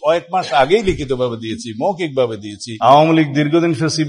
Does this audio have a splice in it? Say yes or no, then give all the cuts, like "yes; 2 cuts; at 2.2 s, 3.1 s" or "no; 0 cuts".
yes; 1 cut; at 2.6 s